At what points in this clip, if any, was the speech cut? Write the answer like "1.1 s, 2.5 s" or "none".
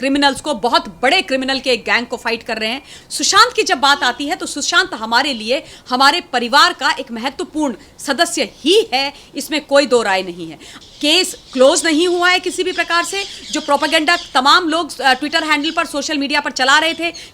2.9 s, 10.8 s